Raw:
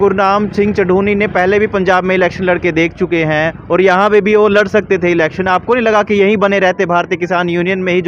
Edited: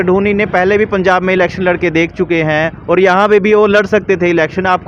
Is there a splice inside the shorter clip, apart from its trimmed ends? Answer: no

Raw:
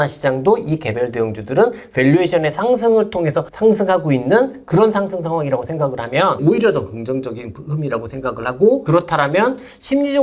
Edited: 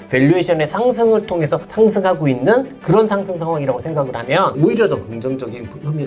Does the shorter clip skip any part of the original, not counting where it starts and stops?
no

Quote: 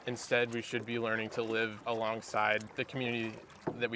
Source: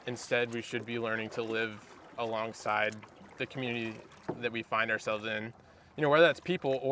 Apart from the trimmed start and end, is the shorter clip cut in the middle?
yes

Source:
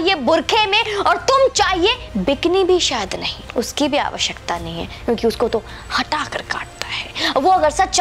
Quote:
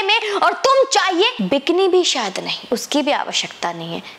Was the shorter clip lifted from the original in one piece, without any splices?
no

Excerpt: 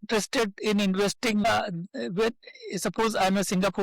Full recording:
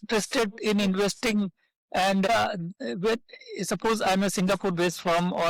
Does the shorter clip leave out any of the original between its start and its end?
yes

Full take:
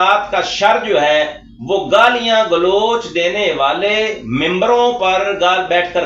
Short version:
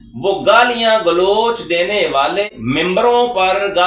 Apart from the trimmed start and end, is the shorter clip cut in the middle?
yes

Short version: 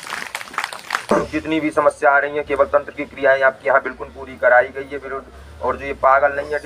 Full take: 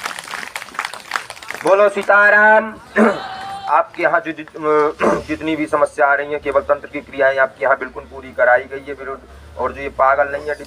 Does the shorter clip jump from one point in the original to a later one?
yes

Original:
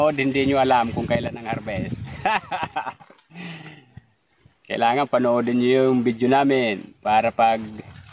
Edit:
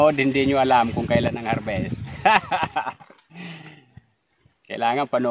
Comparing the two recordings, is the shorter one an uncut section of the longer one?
yes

